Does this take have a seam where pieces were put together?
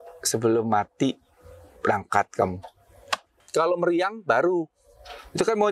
yes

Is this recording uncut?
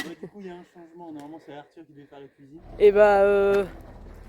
no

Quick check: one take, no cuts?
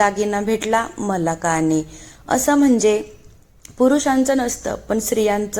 yes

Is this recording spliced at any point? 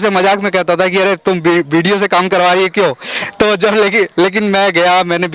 no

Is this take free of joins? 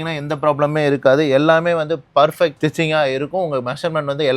no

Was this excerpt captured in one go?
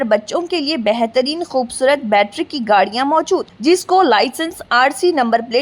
yes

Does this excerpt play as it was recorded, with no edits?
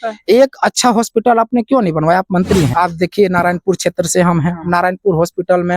no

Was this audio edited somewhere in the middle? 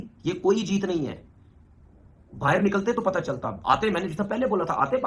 no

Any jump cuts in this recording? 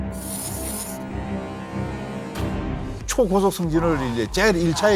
yes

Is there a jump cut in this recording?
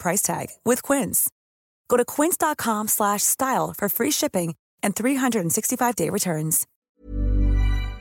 yes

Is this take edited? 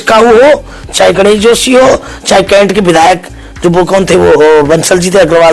no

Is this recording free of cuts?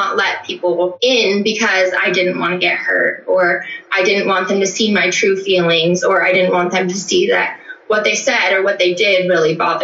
no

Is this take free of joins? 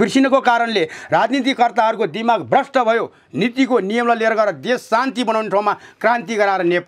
yes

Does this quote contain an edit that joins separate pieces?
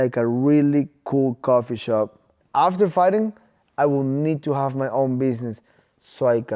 yes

